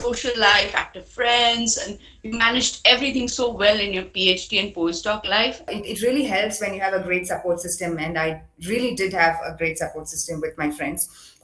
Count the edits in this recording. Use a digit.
1